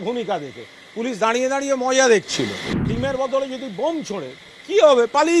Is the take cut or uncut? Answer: cut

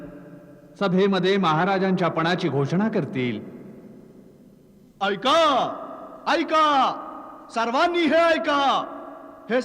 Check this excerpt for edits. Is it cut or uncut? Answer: uncut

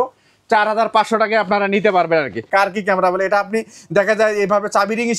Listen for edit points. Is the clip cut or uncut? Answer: cut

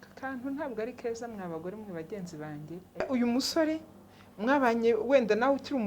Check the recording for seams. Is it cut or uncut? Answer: cut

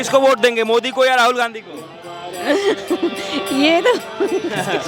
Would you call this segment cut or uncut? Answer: uncut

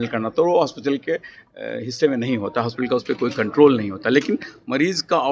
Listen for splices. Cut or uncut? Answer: uncut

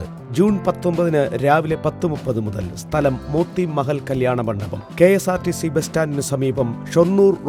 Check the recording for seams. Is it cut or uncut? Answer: uncut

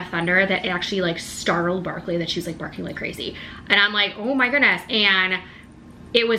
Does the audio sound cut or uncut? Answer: uncut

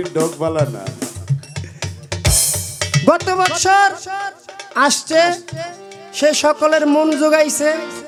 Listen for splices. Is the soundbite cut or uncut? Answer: uncut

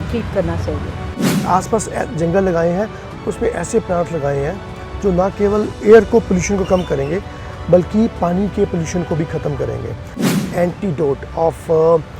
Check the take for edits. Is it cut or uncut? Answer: cut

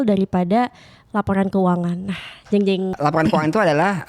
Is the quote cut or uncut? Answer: cut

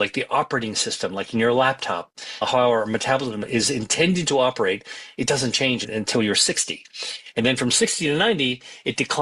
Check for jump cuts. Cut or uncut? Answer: uncut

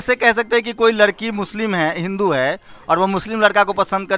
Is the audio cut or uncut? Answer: uncut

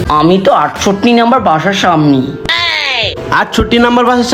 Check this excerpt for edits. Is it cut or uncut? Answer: uncut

